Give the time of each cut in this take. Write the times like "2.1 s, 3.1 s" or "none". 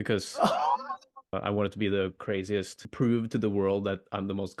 1.4 s, 2.8 s